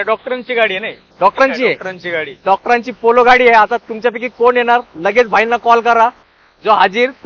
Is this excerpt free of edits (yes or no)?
yes